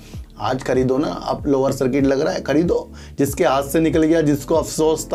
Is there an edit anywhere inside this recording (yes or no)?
no